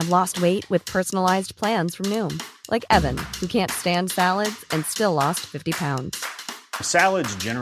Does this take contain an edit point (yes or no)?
no